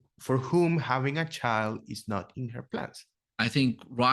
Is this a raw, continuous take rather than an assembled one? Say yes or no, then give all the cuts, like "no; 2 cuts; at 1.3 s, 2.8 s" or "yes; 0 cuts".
no; 1 cut; at 3.2 s